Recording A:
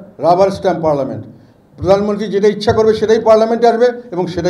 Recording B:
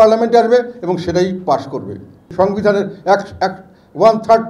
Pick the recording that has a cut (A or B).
B